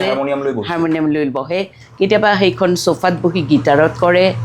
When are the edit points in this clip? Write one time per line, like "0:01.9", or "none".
none